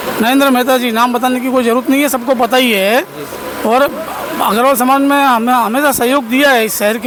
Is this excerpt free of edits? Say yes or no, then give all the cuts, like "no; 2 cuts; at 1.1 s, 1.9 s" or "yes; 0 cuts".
yes; 0 cuts